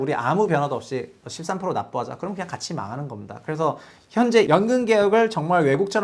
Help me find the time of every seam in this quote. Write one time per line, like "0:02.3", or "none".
0:04.5